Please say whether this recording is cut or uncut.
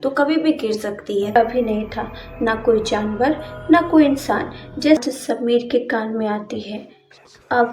cut